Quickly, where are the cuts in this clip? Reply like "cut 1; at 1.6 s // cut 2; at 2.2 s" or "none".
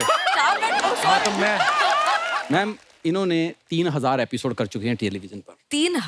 cut 1; at 2.3 s